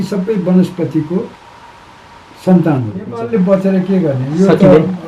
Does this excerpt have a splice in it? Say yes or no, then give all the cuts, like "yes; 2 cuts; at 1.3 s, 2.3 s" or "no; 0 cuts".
yes; 1 cut; at 3.2 s